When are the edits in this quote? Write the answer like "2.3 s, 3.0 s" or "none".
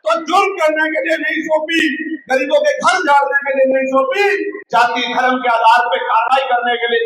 4.6 s